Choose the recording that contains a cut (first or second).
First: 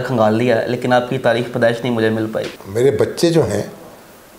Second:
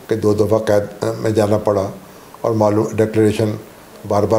first